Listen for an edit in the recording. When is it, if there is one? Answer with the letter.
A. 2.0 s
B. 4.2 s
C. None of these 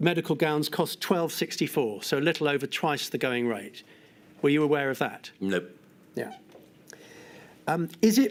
C